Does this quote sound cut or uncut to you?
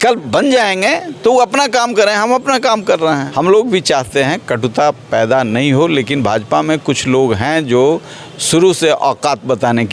cut